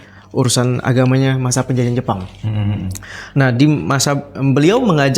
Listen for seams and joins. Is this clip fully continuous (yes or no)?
yes